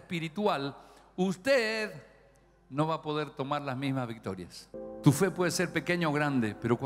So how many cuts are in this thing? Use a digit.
1